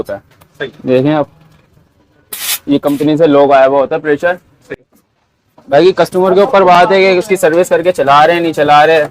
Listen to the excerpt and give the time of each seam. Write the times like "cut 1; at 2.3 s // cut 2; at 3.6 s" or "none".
cut 1; at 4.7 s